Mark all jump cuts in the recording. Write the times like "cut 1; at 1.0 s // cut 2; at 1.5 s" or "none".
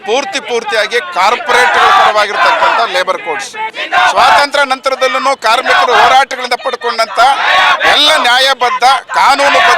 cut 1; at 3.7 s

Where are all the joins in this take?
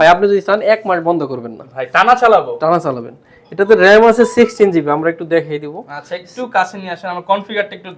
none

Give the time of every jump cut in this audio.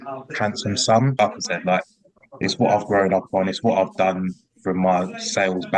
cut 1; at 1.3 s

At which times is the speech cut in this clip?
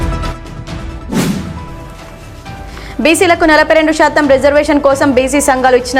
cut 1; at 1.2 s

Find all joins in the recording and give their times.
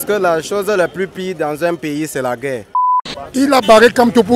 cut 1; at 2.8 s

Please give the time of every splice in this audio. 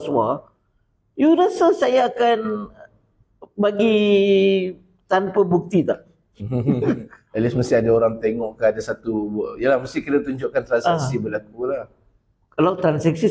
cut 1; at 7.2 s

